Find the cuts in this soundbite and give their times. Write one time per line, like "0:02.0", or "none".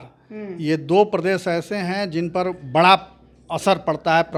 none